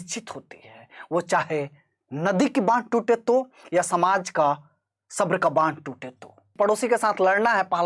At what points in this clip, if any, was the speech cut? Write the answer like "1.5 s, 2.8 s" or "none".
6.5 s